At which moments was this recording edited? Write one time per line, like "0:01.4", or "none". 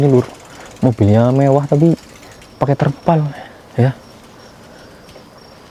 none